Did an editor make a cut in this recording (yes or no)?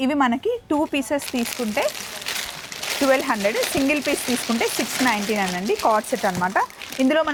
no